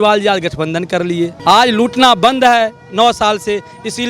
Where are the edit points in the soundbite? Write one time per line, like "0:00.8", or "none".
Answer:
0:01.4